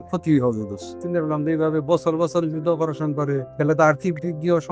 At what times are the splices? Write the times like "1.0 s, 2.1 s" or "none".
1.0 s, 3.5 s